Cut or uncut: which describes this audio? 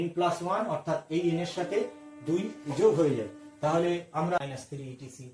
cut